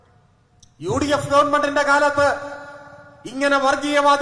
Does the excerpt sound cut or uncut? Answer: uncut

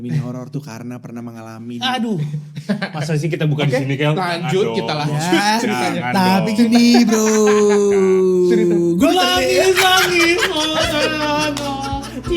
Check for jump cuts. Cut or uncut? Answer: uncut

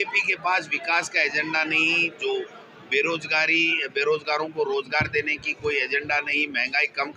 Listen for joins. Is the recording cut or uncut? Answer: uncut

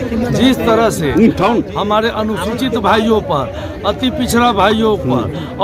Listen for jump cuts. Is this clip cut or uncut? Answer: uncut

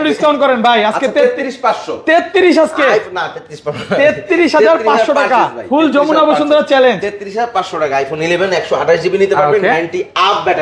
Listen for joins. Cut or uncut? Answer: uncut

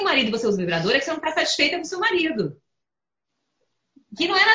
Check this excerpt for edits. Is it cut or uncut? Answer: uncut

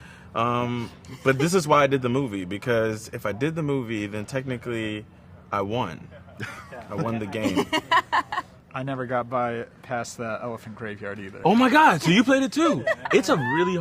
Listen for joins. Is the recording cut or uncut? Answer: uncut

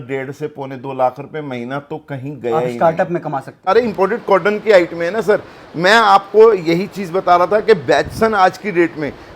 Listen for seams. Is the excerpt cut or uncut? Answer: cut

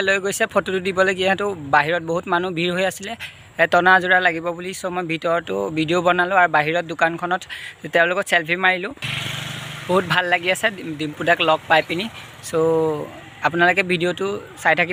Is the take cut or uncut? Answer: uncut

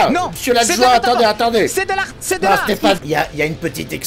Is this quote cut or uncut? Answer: cut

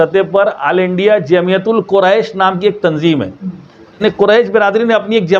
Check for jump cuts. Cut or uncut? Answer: cut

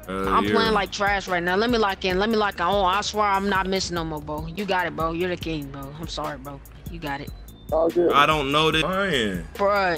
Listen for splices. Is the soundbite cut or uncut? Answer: cut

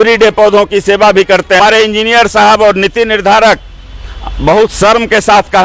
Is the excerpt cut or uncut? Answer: cut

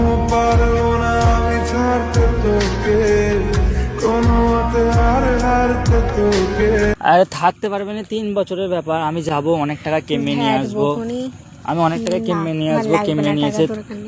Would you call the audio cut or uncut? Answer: uncut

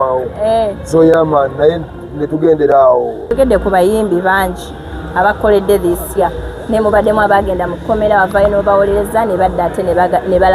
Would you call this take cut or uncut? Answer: cut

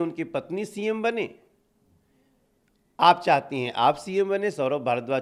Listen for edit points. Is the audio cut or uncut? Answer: uncut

